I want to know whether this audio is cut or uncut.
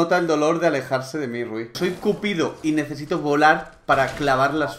cut